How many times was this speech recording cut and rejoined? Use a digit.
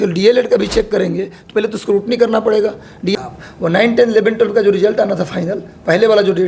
1